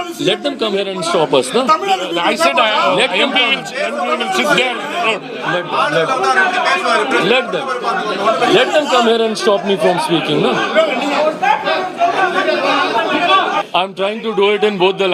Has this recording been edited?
yes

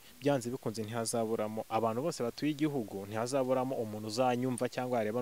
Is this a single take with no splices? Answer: yes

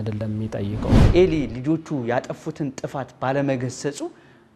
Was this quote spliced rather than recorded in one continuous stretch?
yes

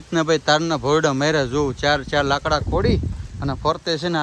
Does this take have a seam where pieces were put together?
no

